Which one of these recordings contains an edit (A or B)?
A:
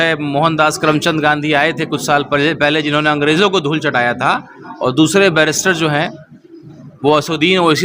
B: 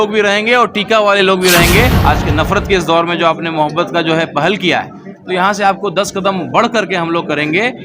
B